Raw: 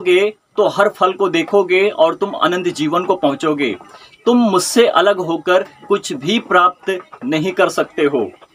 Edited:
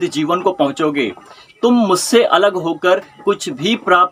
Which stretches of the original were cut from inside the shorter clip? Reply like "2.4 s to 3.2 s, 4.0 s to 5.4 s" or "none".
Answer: none